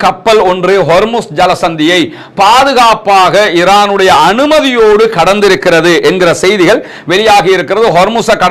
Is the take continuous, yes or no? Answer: yes